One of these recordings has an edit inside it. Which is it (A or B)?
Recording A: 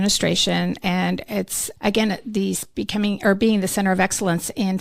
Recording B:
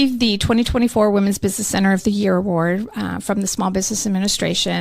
A